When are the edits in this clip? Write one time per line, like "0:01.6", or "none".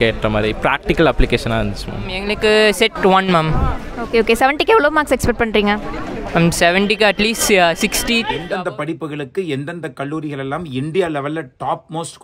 0:02.3
0:08.4